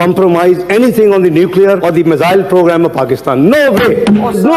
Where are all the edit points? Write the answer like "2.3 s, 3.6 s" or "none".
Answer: none